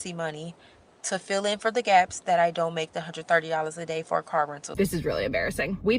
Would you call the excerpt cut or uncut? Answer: cut